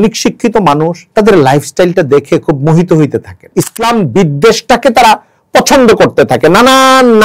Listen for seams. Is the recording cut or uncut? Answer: cut